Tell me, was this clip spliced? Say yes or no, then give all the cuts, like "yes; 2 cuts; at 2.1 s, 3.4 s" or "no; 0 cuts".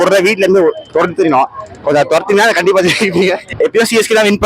yes; 1 cut; at 3.4 s